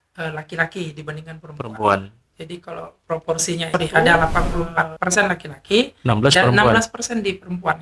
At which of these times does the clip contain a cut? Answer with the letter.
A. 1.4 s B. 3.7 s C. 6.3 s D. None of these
B